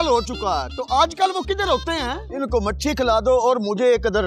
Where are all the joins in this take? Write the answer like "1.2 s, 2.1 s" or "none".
2.2 s